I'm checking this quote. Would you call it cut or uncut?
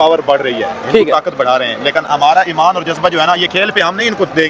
uncut